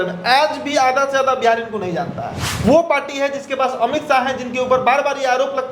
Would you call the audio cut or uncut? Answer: cut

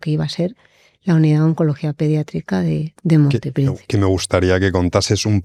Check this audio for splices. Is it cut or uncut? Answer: uncut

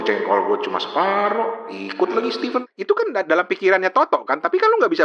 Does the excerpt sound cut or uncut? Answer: cut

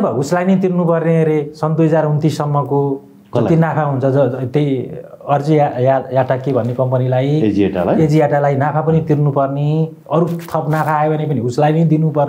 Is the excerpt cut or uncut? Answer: uncut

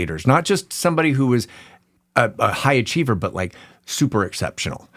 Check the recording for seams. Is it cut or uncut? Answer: uncut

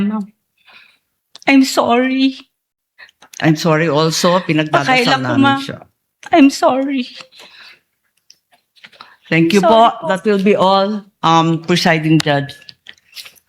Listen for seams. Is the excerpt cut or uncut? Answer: uncut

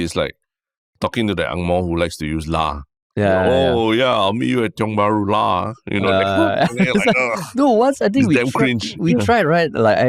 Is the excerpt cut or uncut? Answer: uncut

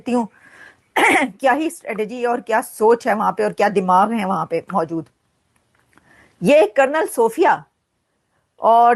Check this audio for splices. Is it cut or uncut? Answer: uncut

